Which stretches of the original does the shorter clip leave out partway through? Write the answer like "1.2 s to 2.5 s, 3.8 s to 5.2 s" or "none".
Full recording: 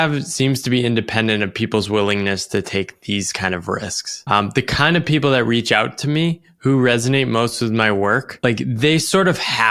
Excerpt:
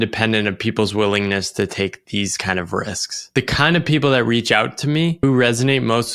4.2 s to 4.5 s, 6.4 s to 6.6 s